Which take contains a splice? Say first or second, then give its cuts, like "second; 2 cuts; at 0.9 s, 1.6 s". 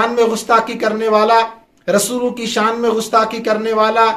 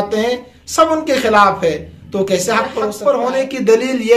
second; 1 cut; at 2.9 s